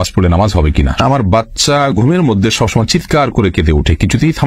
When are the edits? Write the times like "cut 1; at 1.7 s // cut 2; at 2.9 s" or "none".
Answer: cut 1; at 1.0 s

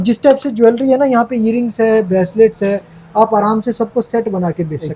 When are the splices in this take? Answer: none

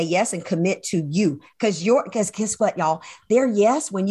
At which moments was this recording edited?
none

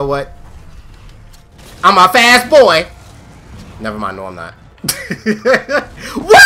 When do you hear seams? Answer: none

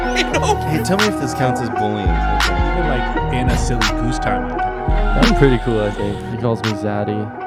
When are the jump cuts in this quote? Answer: none

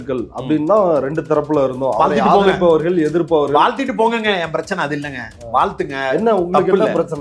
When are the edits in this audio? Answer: none

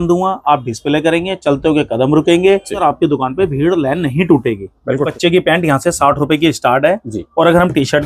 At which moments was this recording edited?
cut 1; at 2.8 s // cut 2; at 5.1 s

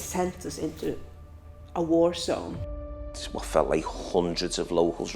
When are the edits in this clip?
cut 1; at 2.9 s

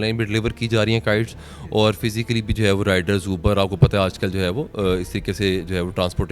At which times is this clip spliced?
none

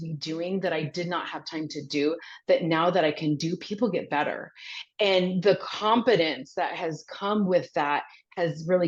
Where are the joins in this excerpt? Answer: none

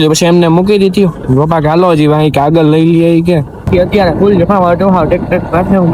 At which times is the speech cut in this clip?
cut 1; at 3.5 s

